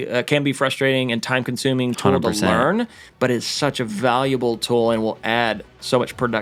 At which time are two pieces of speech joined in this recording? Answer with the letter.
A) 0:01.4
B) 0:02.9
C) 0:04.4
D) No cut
D